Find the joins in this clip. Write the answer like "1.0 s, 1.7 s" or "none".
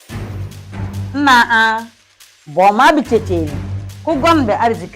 1.1 s